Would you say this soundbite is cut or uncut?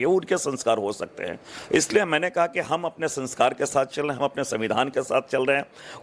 uncut